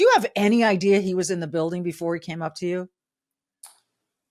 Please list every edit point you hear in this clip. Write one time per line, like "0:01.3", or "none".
none